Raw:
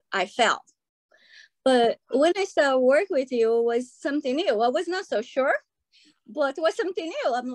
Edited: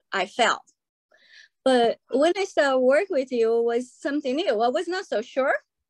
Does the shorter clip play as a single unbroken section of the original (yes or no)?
yes